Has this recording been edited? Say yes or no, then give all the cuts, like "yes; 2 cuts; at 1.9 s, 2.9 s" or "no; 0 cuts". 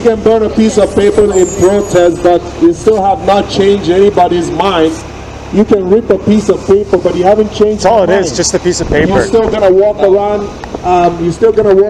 no; 0 cuts